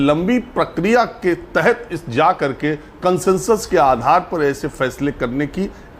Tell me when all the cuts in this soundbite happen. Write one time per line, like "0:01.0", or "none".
none